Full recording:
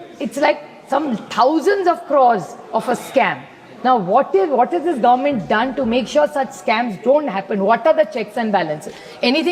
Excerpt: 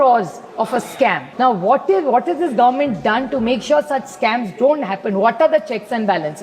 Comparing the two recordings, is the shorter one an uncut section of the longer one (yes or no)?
no